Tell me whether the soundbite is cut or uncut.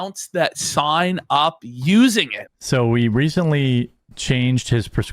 cut